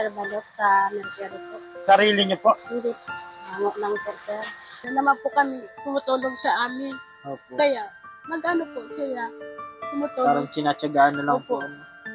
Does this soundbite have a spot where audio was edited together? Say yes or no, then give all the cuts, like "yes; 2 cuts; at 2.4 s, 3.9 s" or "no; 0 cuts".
yes; 1 cut; at 4.8 s